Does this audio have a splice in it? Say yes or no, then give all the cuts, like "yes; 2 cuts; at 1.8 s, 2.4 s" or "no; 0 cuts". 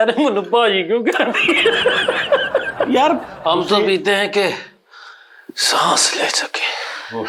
yes; 1 cut; at 3.3 s